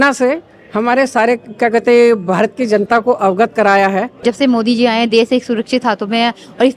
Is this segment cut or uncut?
cut